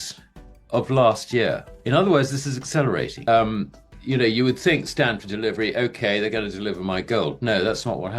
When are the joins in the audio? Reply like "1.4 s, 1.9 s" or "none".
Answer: 3.2 s